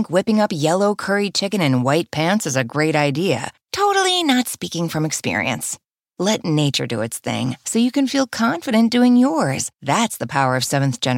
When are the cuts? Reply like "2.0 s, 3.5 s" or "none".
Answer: none